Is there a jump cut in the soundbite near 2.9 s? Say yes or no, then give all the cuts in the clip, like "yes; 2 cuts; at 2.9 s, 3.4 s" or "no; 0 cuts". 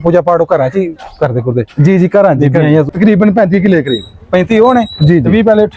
yes; 1 cut; at 2.9 s